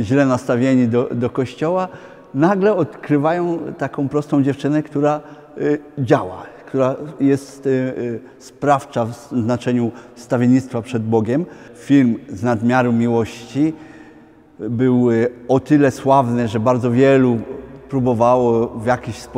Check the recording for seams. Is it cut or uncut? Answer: cut